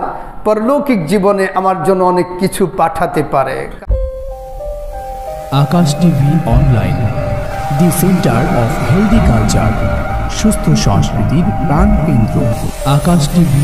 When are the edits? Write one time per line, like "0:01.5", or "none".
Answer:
0:03.7